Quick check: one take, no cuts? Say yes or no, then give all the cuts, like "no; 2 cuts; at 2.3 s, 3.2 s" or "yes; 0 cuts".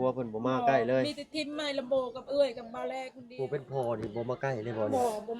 no; 1 cut; at 3.2 s